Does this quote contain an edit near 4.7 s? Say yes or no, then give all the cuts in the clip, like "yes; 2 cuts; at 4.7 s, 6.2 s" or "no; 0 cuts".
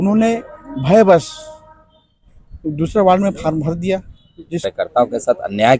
yes; 1 cut; at 4.7 s